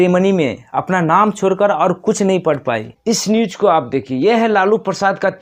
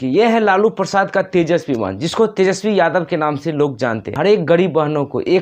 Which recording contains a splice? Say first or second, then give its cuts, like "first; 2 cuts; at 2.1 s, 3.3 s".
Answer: second; 1 cut; at 4.1 s